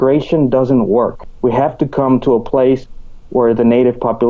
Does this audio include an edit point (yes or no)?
yes